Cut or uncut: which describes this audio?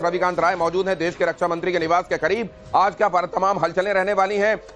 cut